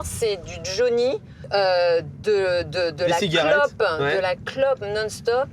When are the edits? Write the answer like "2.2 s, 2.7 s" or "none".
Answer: 1.3 s